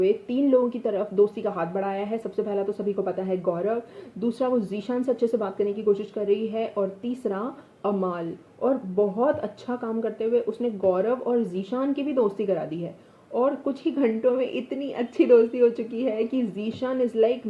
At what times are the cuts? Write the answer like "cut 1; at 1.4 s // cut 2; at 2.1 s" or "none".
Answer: none